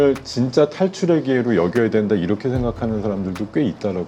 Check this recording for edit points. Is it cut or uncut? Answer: uncut